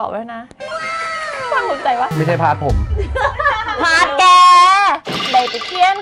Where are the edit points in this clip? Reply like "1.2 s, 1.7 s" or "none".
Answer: none